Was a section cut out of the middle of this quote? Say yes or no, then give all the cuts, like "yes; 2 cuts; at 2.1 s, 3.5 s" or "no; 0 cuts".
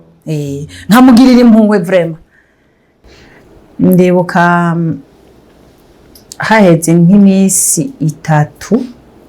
yes; 1 cut; at 2.9 s